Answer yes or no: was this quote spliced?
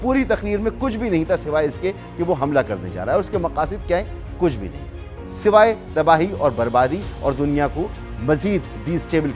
no